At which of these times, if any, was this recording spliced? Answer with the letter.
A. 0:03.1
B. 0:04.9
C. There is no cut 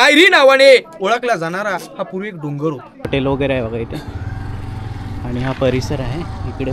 A